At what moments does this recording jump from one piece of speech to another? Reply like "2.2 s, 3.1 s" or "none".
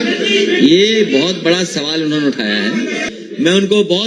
3.0 s